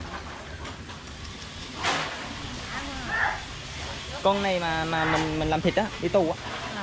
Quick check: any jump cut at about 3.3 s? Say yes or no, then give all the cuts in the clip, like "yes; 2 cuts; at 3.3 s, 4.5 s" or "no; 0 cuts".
no; 0 cuts